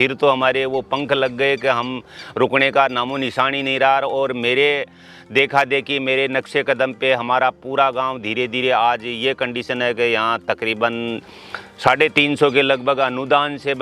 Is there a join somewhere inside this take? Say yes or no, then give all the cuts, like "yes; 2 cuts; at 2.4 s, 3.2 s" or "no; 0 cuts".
no; 0 cuts